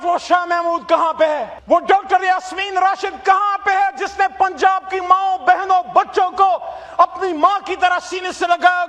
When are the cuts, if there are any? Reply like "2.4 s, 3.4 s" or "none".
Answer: 1.5 s